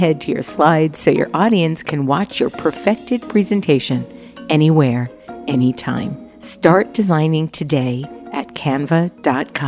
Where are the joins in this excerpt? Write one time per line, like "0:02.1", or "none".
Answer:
none